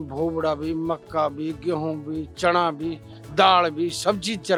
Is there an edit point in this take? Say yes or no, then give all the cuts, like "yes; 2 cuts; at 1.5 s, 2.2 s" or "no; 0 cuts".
no; 0 cuts